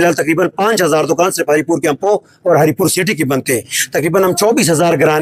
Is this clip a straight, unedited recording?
yes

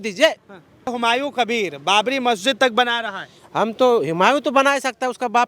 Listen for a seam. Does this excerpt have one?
yes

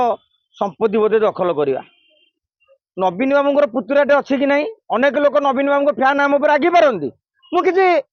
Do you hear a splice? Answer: no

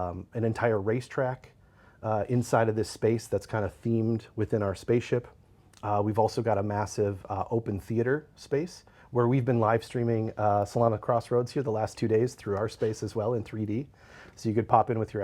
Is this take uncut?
yes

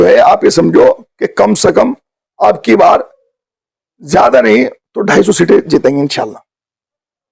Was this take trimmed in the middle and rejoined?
no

